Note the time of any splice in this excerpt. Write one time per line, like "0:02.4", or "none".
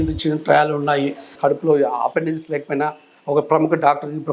0:01.3